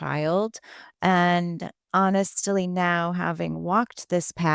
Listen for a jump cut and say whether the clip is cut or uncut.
uncut